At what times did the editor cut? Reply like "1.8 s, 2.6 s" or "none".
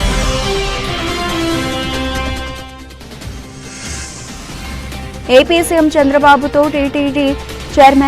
4.3 s